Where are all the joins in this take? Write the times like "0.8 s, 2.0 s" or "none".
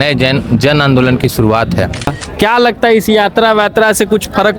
2.1 s